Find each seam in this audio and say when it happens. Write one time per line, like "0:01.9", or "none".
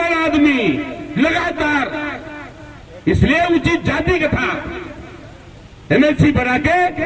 none